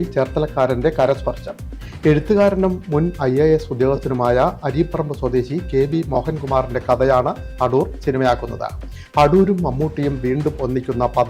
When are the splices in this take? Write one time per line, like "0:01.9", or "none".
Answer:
none